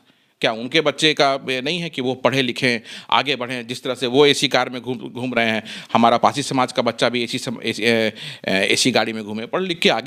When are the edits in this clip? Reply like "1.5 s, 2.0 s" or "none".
none